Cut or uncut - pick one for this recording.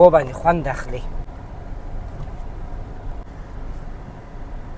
cut